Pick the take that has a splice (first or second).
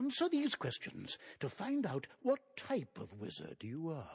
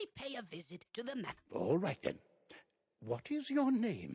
second